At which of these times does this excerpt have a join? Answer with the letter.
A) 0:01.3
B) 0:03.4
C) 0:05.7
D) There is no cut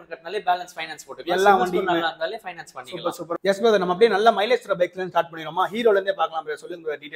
B